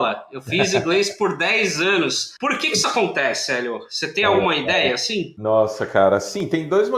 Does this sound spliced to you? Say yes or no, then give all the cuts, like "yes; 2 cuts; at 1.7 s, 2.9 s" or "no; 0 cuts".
yes; 2 cuts; at 2.3 s, 5.3 s